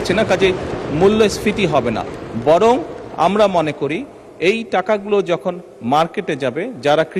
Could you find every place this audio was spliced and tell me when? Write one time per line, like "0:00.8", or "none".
none

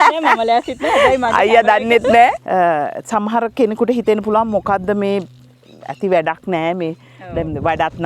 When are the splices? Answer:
0:02.4

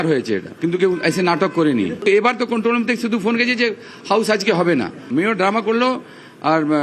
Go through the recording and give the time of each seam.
none

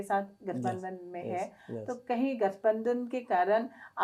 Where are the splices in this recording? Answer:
none

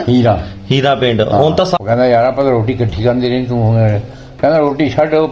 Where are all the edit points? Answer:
0:01.8

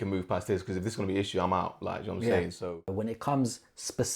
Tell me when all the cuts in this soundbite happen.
0:02.8

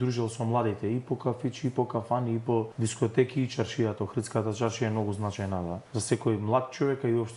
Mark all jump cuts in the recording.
0:02.7
0:05.8

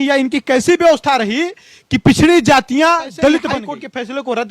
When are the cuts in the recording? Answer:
0:03.5

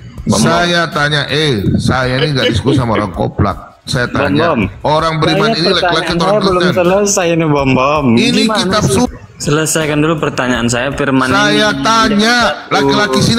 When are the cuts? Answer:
0:09.1

